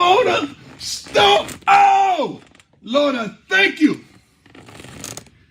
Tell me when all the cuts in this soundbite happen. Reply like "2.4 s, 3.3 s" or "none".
1.5 s

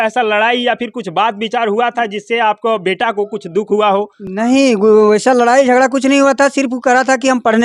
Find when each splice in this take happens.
none

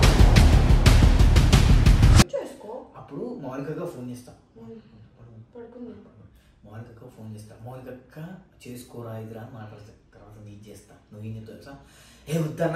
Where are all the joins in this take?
none

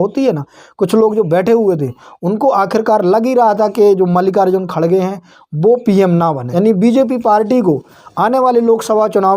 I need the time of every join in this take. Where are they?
6.4 s

